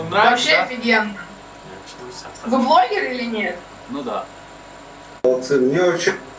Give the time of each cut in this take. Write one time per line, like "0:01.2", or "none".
0:05.2